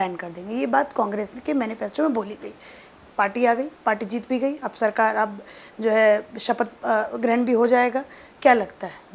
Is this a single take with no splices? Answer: yes; 0 cuts

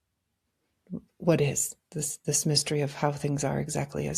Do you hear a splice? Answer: no; 0 cuts

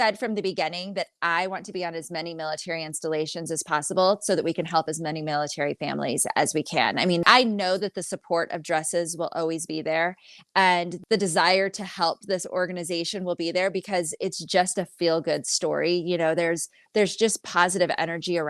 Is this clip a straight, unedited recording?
no; 2 cuts; at 7.2 s, 10.9 s

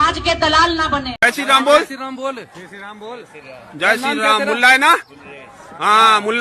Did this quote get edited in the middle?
yes; 1 cut; at 1.1 s

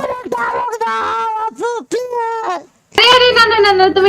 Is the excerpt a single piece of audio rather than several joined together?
no; 1 cut; at 3.0 s

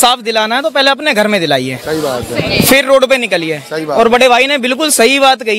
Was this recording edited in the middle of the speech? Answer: no; 0 cuts

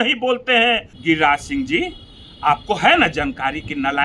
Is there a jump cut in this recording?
yes; 1 cut; at 0.9 s

